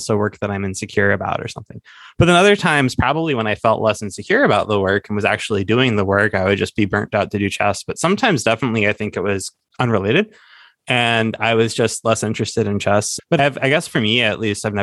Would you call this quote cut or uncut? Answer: uncut